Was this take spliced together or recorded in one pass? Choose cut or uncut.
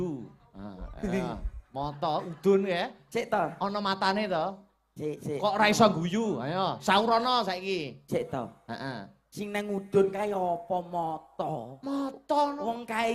uncut